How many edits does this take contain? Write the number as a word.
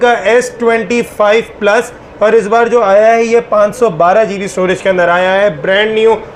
zero